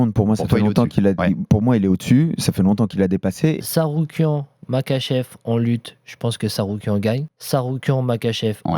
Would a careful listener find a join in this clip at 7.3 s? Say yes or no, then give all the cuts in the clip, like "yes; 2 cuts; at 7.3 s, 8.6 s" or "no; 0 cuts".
yes; 2 cuts; at 3.6 s, 7.3 s